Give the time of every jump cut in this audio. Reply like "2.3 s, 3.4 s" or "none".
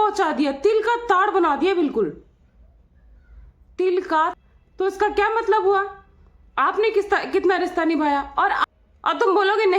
4.3 s, 8.6 s